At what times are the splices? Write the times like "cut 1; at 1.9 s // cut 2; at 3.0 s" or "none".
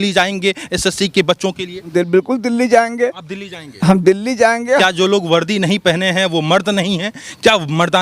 cut 1; at 1.9 s // cut 2; at 4.8 s